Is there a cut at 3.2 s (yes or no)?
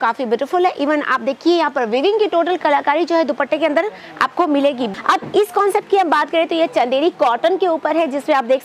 no